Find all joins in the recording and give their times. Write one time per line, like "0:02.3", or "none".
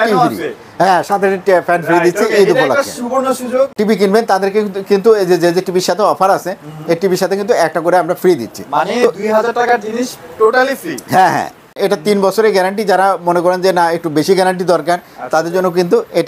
0:03.7
0:11.7